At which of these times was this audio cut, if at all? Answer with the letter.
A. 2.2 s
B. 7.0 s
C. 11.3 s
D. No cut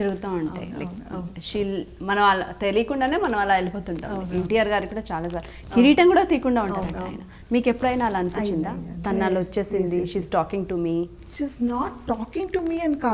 D